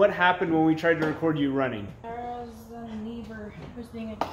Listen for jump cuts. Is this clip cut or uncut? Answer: cut